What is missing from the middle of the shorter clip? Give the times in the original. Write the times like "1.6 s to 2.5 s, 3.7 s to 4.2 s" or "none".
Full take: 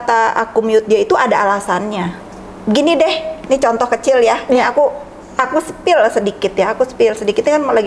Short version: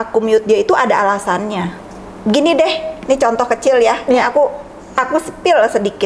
none